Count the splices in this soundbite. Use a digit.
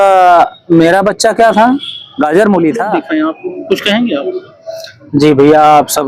1